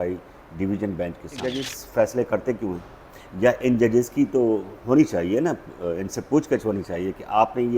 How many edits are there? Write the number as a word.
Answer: one